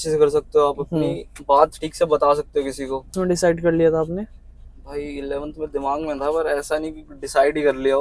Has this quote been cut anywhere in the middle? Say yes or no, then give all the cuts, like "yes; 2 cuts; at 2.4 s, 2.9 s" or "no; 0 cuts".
yes; 1 cut; at 3.2 s